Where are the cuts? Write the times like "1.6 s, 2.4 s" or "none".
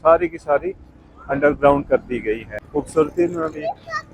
2.5 s